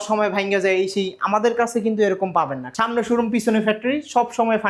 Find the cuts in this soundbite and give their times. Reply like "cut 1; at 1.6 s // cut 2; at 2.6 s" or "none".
cut 1; at 2.6 s